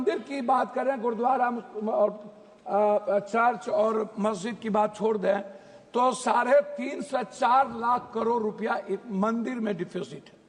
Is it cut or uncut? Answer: uncut